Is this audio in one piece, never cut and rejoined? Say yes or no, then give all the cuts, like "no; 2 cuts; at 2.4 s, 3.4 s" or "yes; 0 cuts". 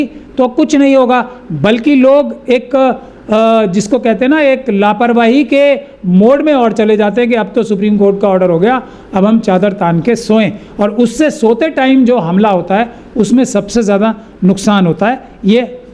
yes; 0 cuts